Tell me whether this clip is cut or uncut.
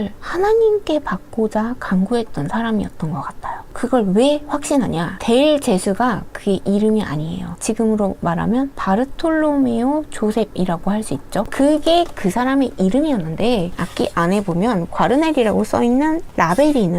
uncut